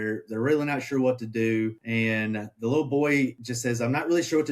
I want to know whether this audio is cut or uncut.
cut